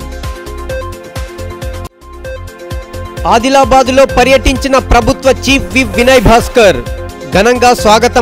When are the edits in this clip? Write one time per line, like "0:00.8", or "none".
0:01.3
0:02.7